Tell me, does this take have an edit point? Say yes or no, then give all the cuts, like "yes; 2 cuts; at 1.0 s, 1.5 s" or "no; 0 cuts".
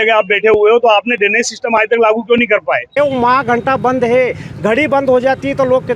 yes; 1 cut; at 3.0 s